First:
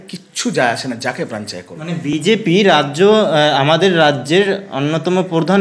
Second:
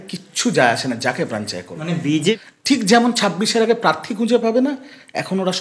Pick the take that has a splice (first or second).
second